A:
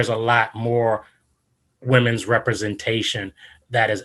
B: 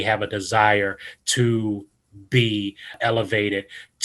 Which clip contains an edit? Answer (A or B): B